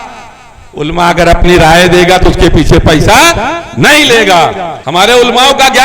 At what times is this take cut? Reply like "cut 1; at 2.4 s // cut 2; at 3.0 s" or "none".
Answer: cut 1; at 4.7 s